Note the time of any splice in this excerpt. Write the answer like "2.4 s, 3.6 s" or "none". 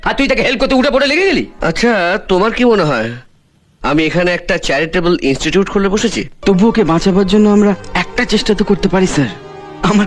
1.5 s, 6.3 s